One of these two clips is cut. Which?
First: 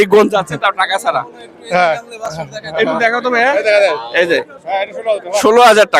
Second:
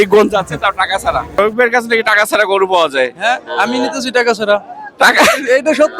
second; 1 cut; at 1.4 s

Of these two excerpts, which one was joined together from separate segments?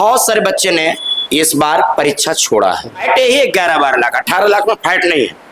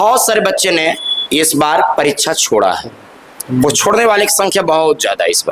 first; 1 cut; at 3.0 s

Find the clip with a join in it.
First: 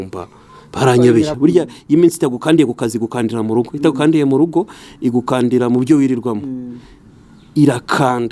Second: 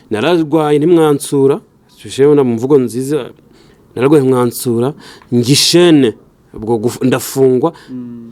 first; 1 cut; at 1.4 s

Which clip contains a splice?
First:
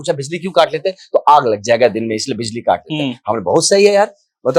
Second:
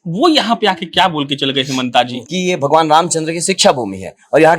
second; 1 cut; at 2.2 s

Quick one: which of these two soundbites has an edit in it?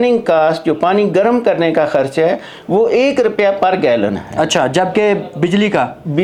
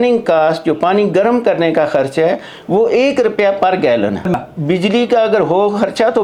second; 1 cut; at 4.4 s

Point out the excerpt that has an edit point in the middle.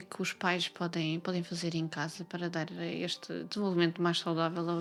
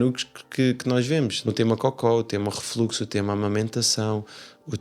second; 1 cut; at 1.5 s

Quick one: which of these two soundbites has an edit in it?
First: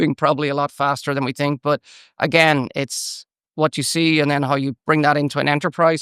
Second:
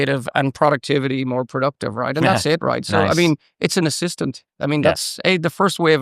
second; 1 cut; at 4.5 s

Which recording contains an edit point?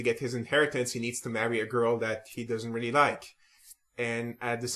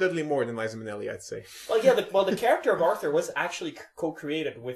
second; 1 cut; at 3.5 s

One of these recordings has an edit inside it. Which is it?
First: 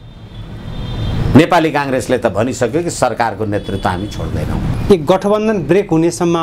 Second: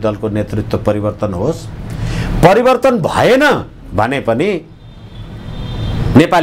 first; 1 cut; at 4.8 s

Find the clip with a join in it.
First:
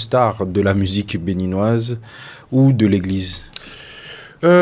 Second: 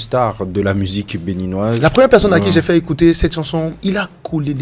second; 2 cuts; at 1.8 s, 3.8 s

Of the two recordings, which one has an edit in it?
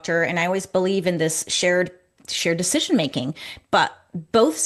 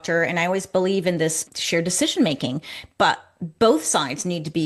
second; 1 cut; at 1.5 s

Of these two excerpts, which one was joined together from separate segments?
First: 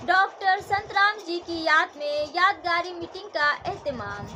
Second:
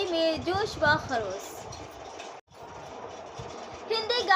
second; 1 cut; at 2.5 s

